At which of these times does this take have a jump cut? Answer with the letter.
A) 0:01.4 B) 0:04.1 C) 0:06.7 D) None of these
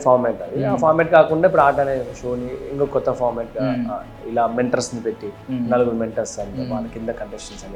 D